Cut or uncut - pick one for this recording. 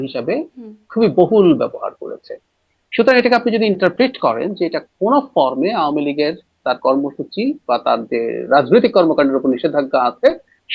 uncut